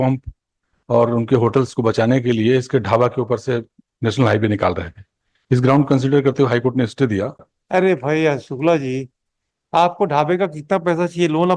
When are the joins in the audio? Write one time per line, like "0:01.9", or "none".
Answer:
0:07.5